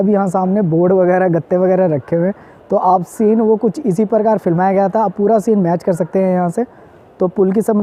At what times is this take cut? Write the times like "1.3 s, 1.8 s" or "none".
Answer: none